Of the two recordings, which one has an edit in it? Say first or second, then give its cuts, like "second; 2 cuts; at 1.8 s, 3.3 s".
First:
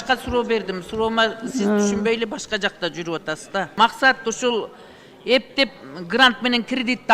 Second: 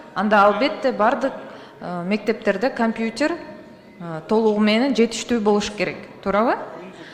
first; 1 cut; at 3.7 s